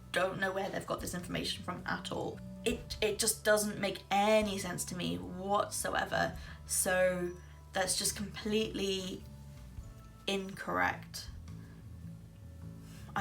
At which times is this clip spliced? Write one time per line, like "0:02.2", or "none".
0:02.5